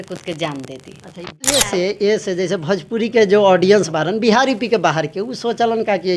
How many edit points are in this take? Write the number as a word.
one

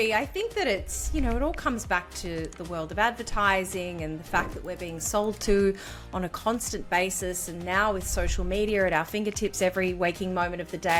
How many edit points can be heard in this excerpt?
zero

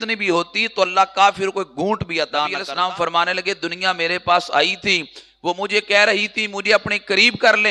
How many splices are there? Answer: one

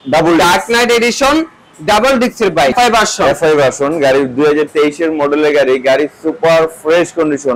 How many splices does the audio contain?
one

